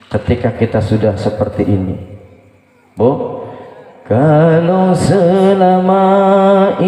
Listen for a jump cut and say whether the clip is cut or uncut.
uncut